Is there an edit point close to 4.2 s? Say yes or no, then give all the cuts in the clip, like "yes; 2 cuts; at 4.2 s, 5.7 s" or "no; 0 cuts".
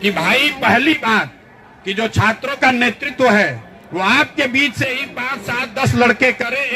no; 1 cut; at 1.0 s